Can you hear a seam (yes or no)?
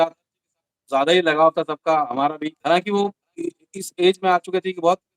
yes